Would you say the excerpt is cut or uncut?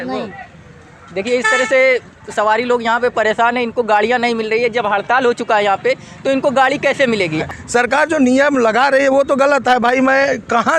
cut